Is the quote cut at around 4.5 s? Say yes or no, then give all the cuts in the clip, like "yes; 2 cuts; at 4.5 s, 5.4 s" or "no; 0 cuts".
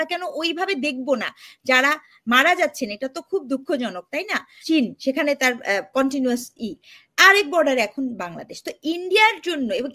yes; 1 cut; at 4.5 s